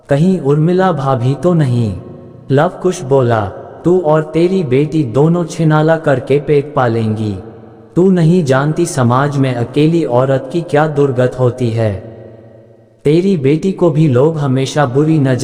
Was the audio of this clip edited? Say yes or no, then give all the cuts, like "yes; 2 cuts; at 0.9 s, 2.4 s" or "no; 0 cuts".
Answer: yes; 1 cut; at 2.3 s